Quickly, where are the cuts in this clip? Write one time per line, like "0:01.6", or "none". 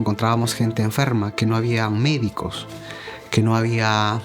none